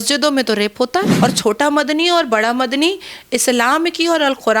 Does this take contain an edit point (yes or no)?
yes